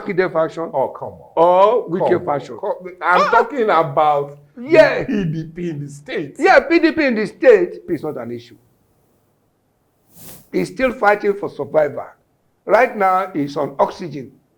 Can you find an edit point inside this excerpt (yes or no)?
yes